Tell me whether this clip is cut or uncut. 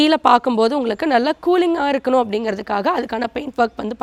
uncut